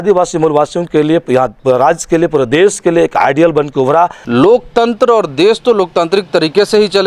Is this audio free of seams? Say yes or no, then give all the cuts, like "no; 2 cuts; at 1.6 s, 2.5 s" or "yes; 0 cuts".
no; 1 cut; at 4.2 s